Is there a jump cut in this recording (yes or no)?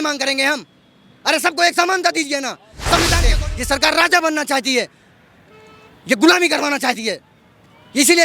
yes